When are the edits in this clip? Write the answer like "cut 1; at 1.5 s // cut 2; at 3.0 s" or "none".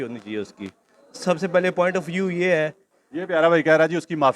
cut 1; at 2.9 s